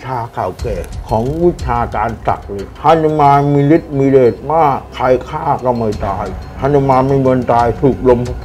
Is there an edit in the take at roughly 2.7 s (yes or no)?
yes